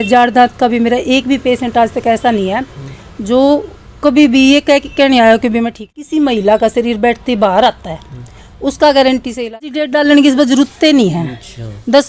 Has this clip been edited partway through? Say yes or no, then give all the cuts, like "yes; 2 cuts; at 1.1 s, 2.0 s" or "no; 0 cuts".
yes; 2 cuts; at 5.9 s, 9.7 s